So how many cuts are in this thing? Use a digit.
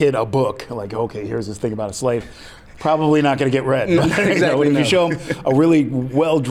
0